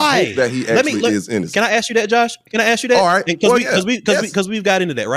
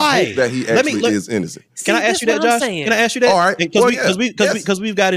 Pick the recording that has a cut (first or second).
first